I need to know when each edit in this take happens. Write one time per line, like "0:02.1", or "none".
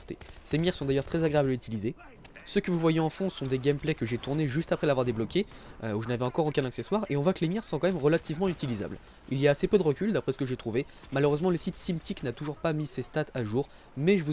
none